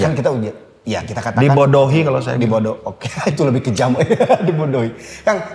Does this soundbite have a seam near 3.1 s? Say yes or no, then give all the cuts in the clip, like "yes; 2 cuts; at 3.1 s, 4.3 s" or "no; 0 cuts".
no; 0 cuts